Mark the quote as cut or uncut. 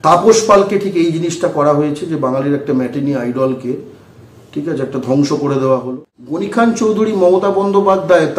cut